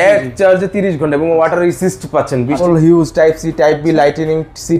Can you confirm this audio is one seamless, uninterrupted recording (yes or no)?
no